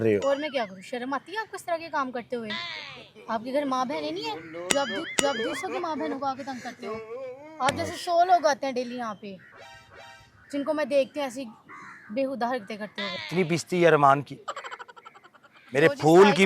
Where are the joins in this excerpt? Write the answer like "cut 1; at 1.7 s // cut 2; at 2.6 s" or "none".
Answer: cut 1; at 13.2 s